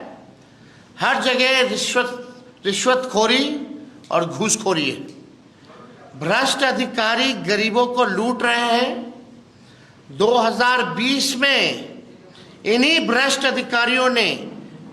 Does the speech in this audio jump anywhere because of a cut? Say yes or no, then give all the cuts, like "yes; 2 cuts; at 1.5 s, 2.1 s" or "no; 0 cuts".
no; 0 cuts